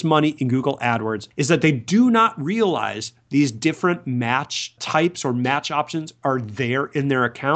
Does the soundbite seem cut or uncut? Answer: cut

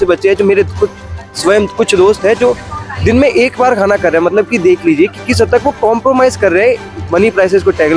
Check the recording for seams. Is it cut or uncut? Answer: uncut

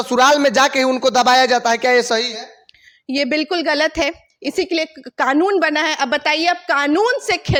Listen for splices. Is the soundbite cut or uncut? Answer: uncut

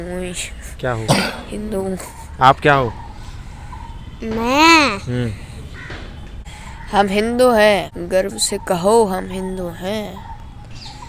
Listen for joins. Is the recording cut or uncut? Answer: uncut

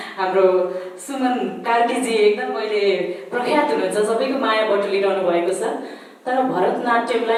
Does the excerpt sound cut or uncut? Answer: uncut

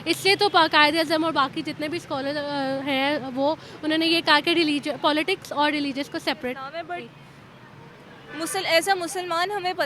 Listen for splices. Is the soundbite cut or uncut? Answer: cut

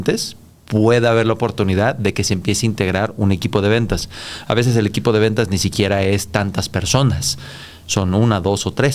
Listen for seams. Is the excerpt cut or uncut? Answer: uncut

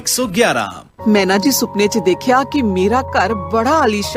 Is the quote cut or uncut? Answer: cut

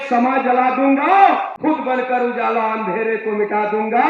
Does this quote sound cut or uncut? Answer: cut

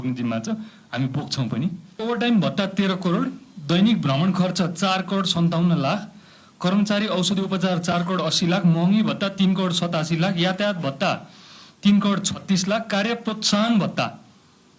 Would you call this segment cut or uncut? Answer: cut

